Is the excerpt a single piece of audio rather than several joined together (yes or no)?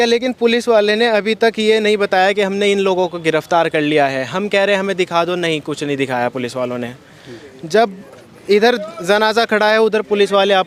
yes